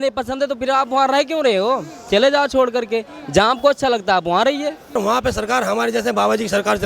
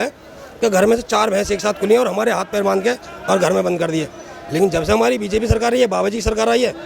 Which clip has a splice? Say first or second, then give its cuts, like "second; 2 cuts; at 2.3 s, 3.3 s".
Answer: first; 1 cut; at 5.0 s